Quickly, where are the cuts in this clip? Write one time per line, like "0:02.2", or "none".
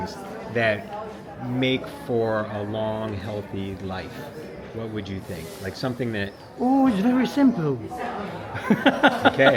none